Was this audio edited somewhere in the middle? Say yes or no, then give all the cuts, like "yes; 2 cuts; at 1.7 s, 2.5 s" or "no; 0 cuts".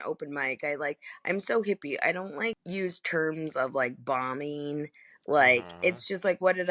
yes; 1 cut; at 2.6 s